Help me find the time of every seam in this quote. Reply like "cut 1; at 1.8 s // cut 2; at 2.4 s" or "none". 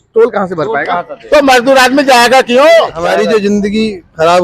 cut 1; at 3.1 s

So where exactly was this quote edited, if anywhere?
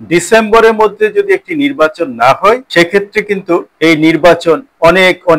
cut 1; at 2.7 s // cut 2; at 3.7 s

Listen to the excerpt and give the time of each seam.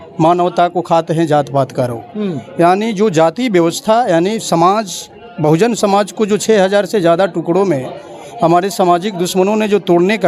none

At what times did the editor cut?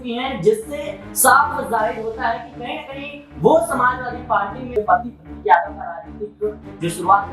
cut 1; at 4.7 s

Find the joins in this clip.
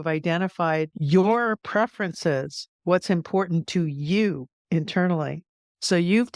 cut 1; at 1.0 s // cut 2; at 1.6 s

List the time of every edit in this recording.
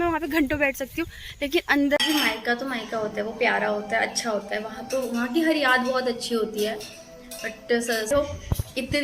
cut 1; at 2.0 s // cut 2; at 8.1 s

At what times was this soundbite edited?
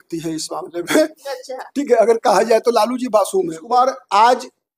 cut 1; at 3.6 s

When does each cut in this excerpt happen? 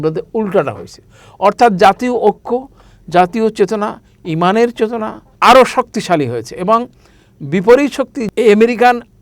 cut 1; at 5.2 s // cut 2; at 8.2 s

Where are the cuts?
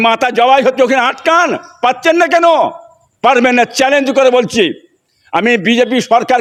none

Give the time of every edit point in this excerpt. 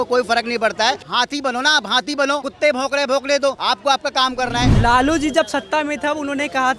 cut 1; at 1.0 s // cut 2; at 2.5 s // cut 3; at 3.6 s // cut 4; at 4.7 s

